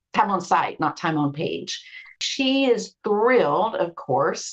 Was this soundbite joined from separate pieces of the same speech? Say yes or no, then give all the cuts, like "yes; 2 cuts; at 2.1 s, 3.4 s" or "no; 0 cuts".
yes; 1 cut; at 2.2 s